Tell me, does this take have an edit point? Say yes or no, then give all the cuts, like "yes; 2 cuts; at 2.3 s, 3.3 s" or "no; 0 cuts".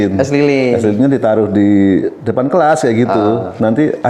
no; 0 cuts